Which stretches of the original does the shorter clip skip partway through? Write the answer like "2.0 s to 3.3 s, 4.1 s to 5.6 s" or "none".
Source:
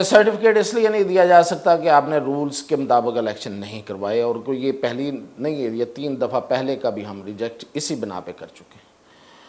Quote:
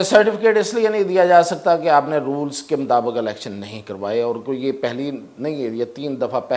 none